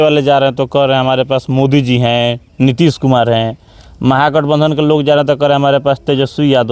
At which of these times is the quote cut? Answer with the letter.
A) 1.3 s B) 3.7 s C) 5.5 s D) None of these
D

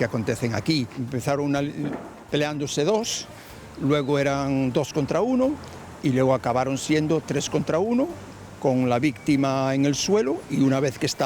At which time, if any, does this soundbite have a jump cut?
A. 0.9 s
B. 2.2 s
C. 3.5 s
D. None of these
A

